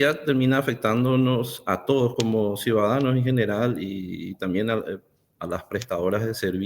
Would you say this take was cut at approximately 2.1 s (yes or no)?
yes